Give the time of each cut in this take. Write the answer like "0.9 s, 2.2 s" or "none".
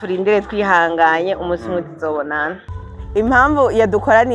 2.7 s